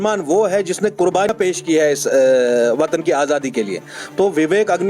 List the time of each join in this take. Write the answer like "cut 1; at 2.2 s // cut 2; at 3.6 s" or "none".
cut 1; at 1.3 s